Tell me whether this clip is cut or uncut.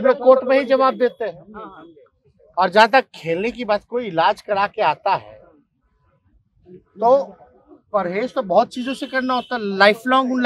uncut